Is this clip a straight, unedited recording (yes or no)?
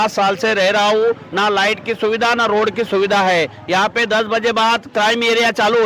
yes